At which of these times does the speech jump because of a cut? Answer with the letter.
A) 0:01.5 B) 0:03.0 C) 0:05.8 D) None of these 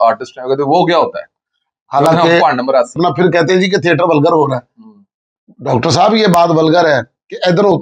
B